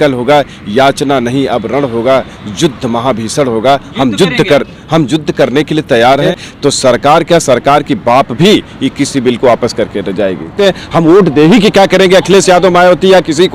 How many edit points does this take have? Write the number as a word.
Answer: two